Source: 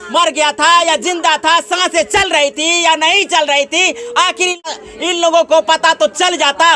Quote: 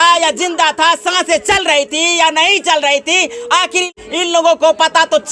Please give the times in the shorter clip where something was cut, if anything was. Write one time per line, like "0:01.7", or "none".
0:04.0